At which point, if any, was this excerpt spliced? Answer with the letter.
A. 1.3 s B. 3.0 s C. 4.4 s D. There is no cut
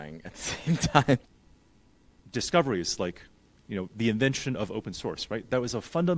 A